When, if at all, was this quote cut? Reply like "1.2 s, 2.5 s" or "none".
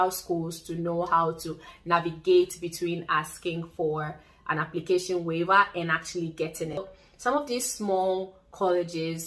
6.8 s